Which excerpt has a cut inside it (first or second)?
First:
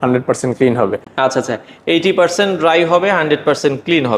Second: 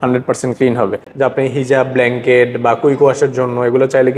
second